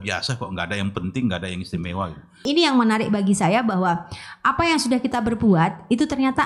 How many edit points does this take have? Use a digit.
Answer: 1